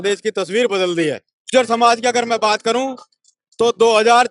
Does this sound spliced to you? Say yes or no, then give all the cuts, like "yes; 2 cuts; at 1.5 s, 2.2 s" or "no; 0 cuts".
yes; 1 cut; at 1.3 s